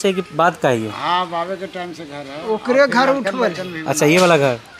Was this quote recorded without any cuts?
yes; 0 cuts

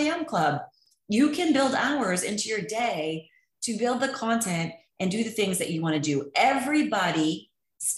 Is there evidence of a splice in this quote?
no; 0 cuts

